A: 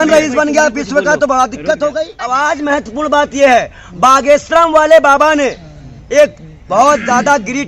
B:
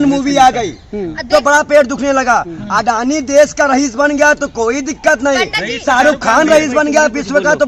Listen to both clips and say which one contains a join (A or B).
A